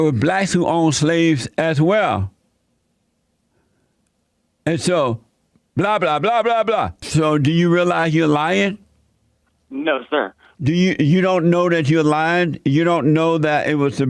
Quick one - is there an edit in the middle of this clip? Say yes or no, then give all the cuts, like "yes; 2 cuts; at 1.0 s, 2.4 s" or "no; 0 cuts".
yes; 2 cuts; at 7.0 s, 10.4 s